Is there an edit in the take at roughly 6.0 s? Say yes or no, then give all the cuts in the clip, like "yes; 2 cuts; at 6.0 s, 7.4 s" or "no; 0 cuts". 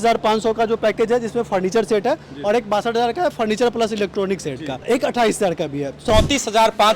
yes; 2 cuts; at 4.8 s, 6.0 s